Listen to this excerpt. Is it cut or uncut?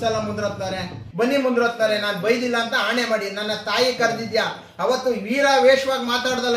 cut